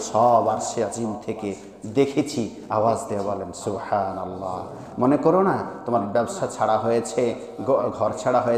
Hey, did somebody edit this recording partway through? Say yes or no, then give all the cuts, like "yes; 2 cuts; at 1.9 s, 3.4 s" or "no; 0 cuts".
no; 0 cuts